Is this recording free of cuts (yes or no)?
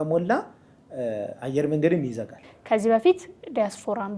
no